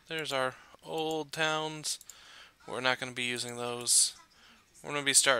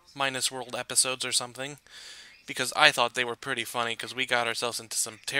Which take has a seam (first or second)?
first